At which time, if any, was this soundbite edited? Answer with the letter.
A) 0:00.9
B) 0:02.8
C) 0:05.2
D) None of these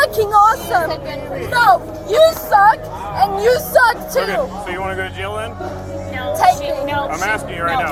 D